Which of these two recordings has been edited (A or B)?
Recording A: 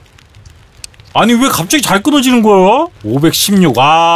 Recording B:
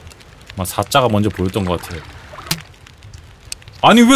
A